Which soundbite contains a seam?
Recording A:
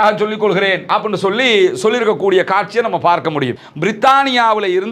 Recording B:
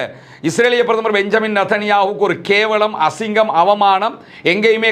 A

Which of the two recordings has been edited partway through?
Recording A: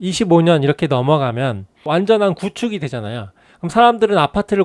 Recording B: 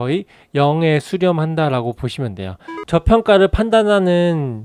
B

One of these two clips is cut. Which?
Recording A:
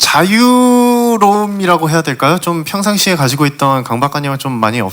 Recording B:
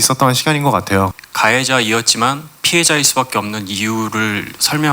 B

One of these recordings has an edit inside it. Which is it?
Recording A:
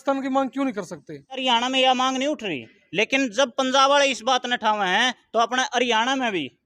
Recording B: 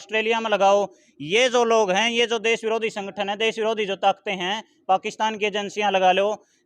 A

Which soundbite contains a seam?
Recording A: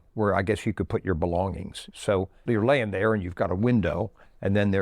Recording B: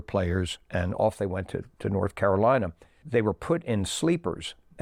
A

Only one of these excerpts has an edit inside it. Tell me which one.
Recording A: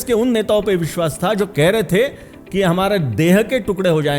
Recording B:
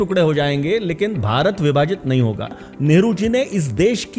B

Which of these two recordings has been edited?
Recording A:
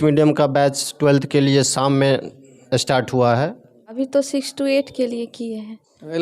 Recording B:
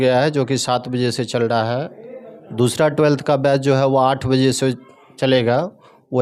A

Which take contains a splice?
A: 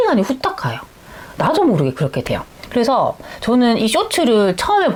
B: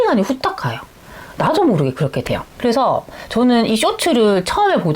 B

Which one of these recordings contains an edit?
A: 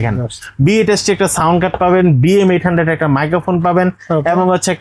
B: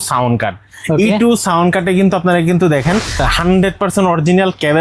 B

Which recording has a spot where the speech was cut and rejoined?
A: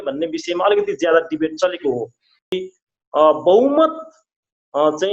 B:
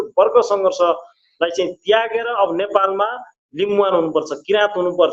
A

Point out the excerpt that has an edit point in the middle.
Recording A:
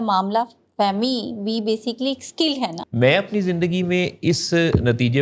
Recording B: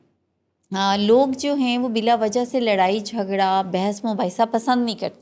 A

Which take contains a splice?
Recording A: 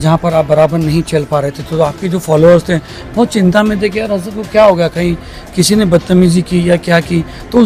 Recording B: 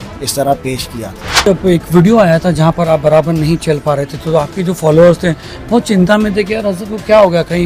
B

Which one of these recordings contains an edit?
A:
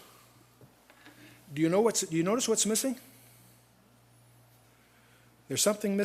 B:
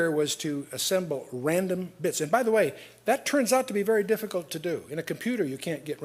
B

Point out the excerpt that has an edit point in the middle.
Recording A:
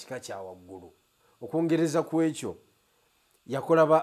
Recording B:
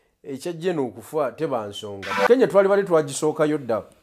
B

